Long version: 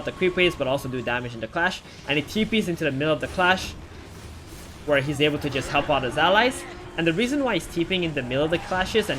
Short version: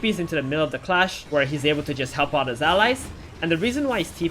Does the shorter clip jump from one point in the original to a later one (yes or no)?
yes